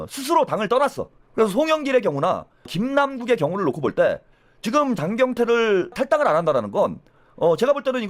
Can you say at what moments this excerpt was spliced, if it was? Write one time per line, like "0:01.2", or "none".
0:01.2
0:02.7
0:06.0